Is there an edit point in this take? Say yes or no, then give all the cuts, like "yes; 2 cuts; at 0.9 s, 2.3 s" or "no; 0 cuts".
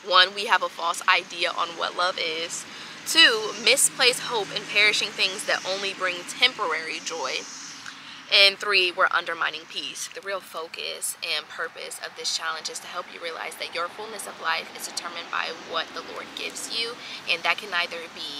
yes; 1 cut; at 10.1 s